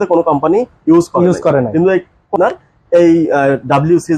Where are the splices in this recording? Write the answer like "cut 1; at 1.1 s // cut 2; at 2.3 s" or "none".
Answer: cut 1; at 2.3 s